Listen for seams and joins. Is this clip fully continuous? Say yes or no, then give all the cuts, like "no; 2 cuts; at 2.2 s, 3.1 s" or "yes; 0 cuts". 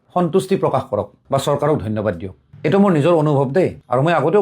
yes; 0 cuts